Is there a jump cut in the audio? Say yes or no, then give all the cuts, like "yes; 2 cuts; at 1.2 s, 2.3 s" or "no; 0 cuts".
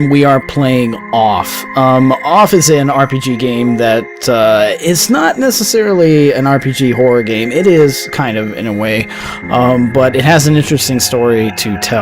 no; 0 cuts